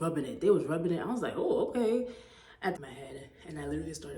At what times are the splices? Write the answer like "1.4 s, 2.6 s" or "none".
2.8 s